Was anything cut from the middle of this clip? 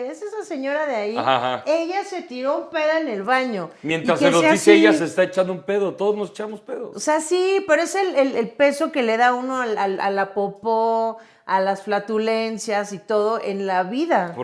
no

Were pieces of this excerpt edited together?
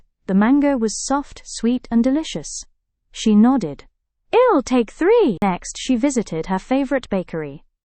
yes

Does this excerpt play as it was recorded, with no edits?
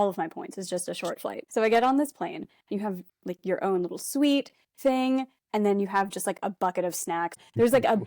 no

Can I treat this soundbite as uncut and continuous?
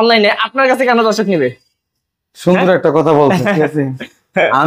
yes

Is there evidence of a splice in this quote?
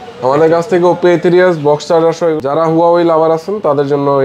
yes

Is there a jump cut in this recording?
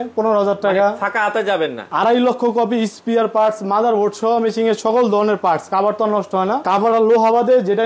yes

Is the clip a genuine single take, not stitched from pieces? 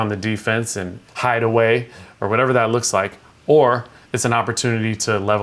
no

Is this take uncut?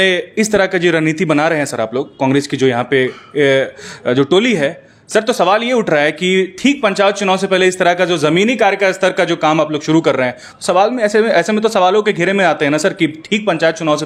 yes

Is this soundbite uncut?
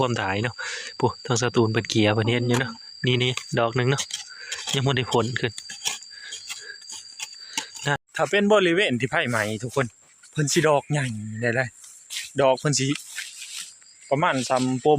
no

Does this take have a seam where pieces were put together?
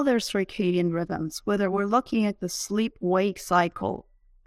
no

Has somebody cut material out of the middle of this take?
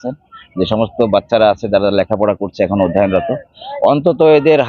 no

